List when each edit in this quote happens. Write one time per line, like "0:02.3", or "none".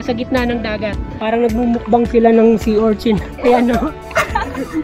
0:01.1